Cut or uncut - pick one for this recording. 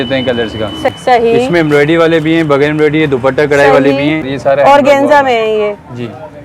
cut